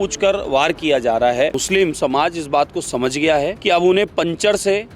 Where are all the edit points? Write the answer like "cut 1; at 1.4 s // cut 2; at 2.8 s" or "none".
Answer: cut 1; at 1.6 s // cut 2; at 3.6 s